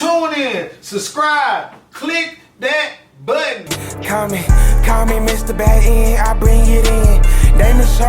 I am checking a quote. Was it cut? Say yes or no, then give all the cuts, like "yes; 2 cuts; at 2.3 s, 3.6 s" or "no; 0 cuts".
yes; 1 cut; at 3.8 s